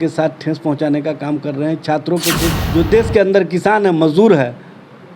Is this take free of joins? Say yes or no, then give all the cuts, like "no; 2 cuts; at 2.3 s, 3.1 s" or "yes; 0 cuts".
no; 1 cut; at 2.6 s